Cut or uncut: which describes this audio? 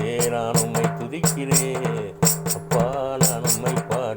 cut